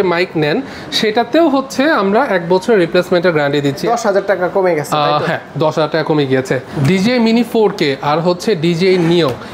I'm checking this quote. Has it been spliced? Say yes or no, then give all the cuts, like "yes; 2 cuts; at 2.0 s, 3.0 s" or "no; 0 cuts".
yes; 2 cuts; at 3.8 s, 6.8 s